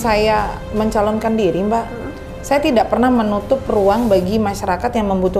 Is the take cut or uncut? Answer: uncut